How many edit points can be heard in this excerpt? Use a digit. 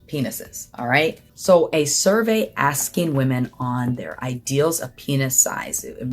1